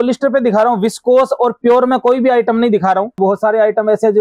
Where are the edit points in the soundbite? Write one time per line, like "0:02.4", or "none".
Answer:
0:03.2